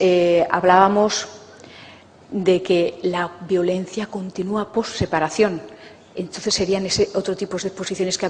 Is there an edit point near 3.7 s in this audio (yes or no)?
no